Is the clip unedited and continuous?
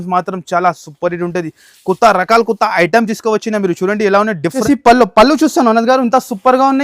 no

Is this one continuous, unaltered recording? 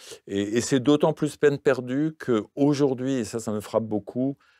yes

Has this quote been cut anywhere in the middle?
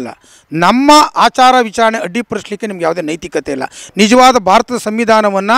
no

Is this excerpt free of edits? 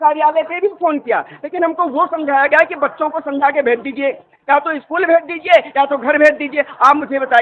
yes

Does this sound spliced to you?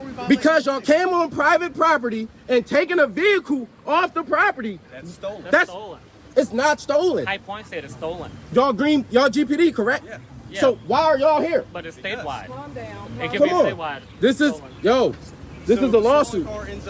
no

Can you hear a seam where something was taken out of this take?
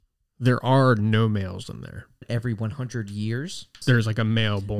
yes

